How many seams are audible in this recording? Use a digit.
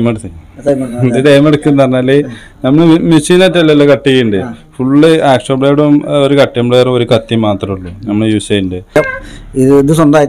1